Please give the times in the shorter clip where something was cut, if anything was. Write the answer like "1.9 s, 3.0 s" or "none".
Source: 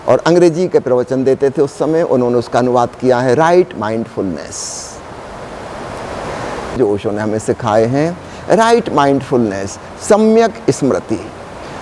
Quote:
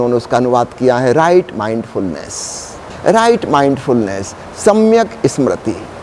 2.8 s